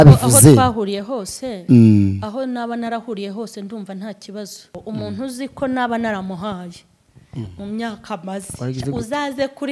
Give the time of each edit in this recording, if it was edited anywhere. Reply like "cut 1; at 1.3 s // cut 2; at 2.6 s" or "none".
cut 1; at 4.7 s